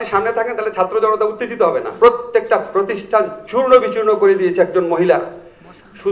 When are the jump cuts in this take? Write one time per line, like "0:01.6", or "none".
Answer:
0:01.9